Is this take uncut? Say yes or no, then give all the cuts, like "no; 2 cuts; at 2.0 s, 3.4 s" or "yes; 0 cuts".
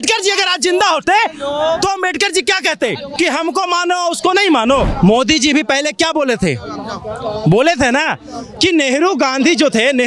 no; 2 cuts; at 3.1 s, 4.9 s